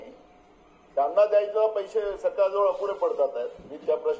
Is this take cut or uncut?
uncut